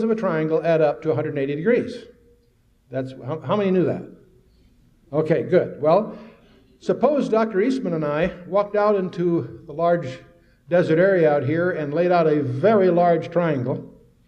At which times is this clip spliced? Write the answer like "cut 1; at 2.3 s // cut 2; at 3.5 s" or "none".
cut 1; at 5.3 s